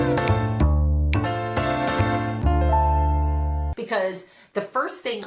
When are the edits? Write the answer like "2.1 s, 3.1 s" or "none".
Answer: 3.7 s